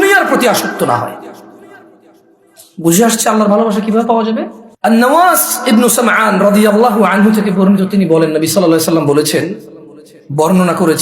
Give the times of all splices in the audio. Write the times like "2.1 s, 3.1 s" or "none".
4.6 s

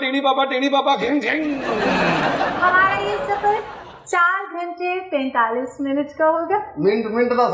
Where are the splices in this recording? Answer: 2.6 s

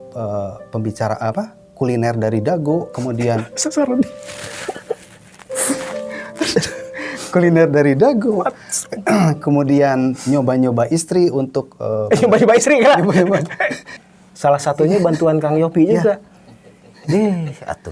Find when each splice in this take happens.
14.0 s

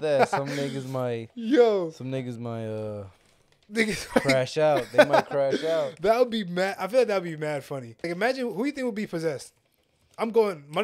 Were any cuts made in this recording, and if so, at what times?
8.1 s

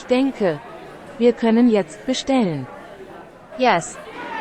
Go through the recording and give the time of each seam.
none

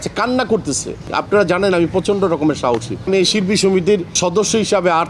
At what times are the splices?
1.1 s, 3.1 s, 4.2 s

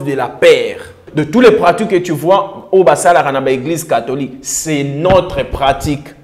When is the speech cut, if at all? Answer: 1.1 s

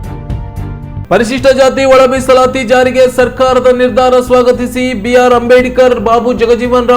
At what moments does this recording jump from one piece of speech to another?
0.9 s

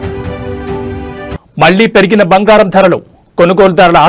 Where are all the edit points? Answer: none

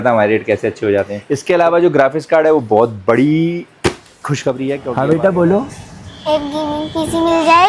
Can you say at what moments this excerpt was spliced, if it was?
1.2 s, 4.9 s

